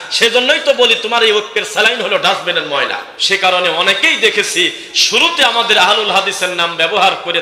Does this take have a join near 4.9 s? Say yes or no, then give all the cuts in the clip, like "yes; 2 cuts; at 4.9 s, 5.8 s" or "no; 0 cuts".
no; 1 cut; at 3.1 s